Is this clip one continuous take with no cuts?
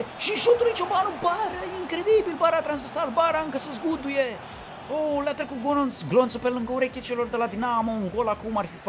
yes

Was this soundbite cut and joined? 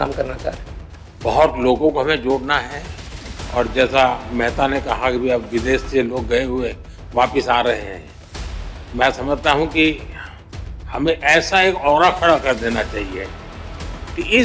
no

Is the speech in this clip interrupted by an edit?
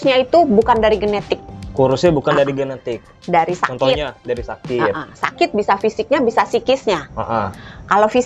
no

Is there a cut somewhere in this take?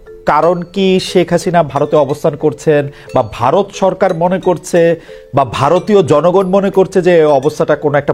no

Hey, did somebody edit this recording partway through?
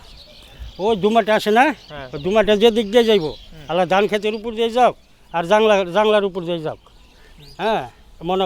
no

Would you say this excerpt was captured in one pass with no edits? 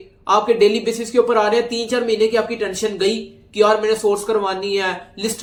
yes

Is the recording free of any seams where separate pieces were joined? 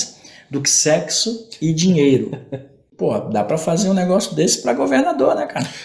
no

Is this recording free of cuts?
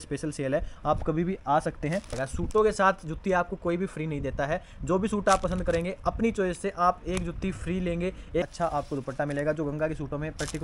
no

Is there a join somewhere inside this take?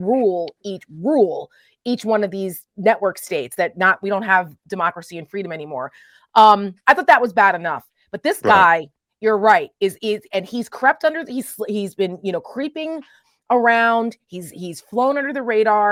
no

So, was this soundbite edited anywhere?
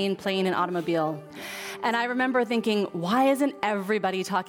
yes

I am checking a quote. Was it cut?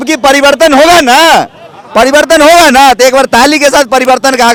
no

